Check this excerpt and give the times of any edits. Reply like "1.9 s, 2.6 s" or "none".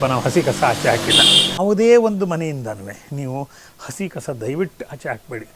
1.6 s